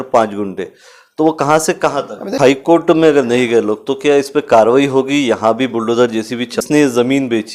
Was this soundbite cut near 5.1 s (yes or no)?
no